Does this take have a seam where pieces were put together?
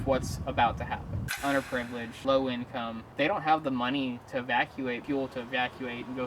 yes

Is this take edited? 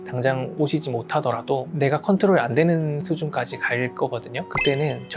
no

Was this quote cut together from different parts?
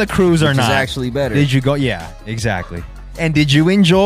yes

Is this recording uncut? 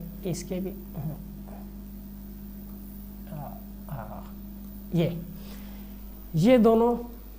yes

